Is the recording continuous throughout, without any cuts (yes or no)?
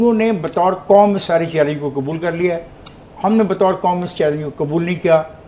yes